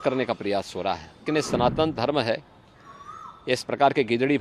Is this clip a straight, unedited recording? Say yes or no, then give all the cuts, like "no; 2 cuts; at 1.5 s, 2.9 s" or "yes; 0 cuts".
no; 1 cut; at 1.1 s